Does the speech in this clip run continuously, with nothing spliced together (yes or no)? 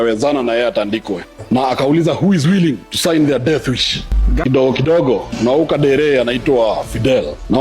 no